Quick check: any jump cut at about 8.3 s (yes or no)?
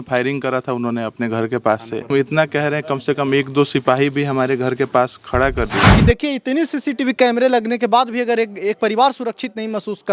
no